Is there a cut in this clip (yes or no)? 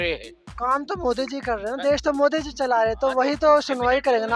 no